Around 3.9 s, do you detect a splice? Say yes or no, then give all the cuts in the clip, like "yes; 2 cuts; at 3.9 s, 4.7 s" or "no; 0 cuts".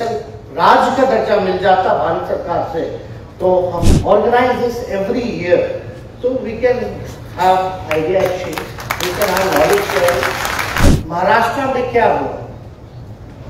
yes; 2 cuts; at 3.9 s, 10.9 s